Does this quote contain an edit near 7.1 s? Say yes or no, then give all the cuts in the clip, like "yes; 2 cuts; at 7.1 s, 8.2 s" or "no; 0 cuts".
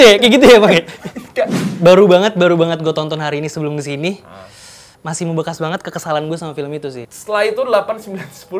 yes; 1 cut; at 7.1 s